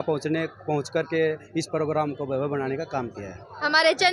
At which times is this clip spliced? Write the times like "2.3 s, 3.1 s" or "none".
none